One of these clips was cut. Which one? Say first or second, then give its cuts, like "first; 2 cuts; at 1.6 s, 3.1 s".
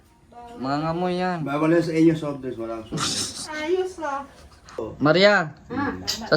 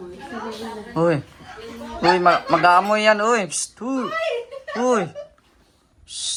first; 1 cut; at 4.9 s